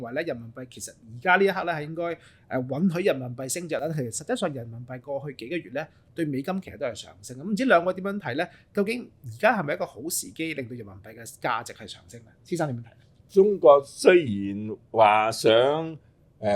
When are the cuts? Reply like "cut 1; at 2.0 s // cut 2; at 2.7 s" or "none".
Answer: none